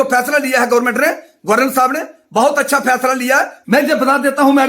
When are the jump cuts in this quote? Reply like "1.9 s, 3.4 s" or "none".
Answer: 3.5 s

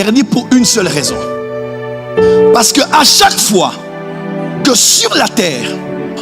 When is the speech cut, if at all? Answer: none

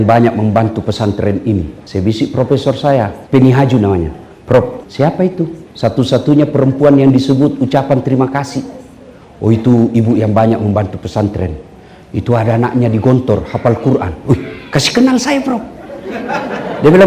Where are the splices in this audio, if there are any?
1.8 s, 3.2 s, 4.8 s, 5.6 s

